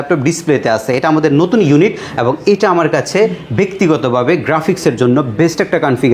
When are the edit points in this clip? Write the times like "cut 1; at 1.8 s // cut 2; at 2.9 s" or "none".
none